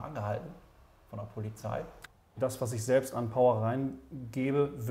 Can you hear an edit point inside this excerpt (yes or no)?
yes